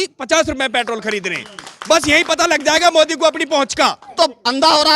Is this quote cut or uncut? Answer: cut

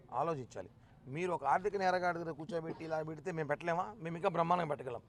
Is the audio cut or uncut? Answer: uncut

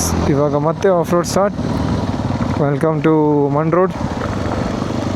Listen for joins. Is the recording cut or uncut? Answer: cut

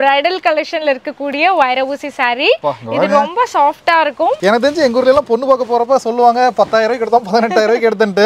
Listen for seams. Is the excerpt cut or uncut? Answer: cut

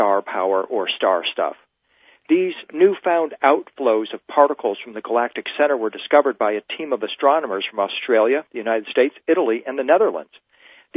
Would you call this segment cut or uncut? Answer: cut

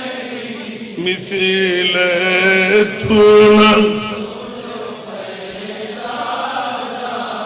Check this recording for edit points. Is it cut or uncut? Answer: uncut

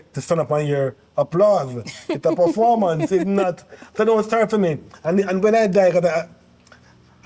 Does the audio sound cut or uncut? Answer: uncut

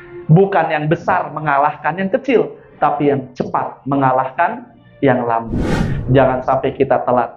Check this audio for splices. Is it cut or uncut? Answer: cut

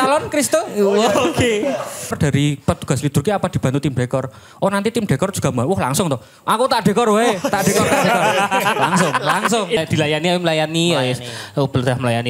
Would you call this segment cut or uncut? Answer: cut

